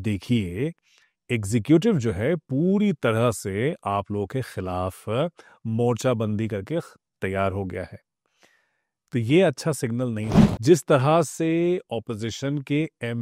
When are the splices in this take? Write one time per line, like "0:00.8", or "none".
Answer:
0:10.3